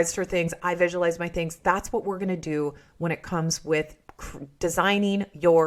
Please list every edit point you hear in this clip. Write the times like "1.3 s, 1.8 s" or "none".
none